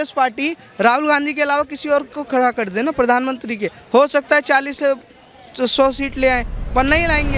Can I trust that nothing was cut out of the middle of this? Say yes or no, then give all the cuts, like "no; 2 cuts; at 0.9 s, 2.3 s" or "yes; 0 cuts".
yes; 0 cuts